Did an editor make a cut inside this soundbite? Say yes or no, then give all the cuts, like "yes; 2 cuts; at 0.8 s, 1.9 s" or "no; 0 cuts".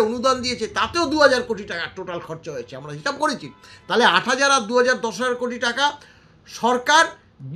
no; 0 cuts